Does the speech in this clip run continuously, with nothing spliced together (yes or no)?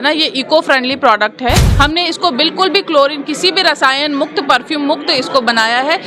no